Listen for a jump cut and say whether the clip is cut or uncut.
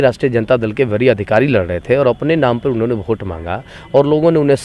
uncut